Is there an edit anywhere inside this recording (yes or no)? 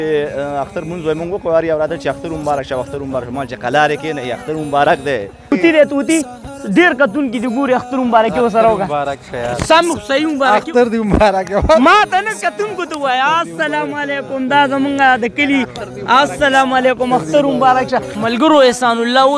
yes